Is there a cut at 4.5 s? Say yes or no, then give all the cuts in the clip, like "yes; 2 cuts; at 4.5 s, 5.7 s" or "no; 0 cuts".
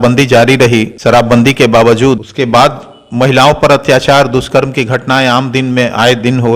no; 2 cuts; at 0.9 s, 2.3 s